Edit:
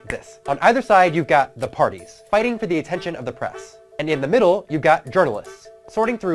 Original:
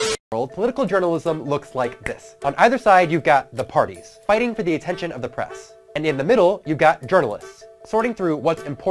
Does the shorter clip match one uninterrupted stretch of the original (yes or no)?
yes